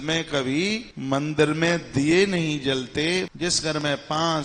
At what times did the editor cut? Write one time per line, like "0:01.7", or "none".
0:00.9
0:03.3